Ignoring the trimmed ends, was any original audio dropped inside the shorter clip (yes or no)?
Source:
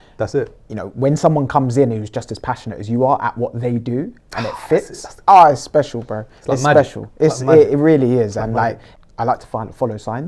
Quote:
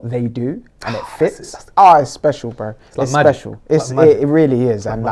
no